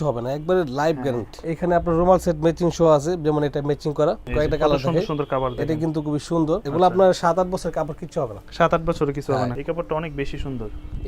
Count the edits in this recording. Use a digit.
4